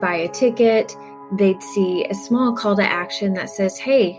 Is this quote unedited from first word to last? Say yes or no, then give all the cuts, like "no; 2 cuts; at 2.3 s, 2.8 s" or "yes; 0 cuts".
yes; 0 cuts